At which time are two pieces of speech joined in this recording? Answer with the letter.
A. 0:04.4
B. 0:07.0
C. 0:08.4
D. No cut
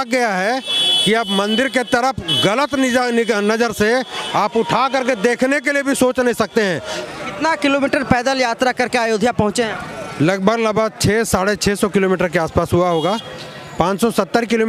B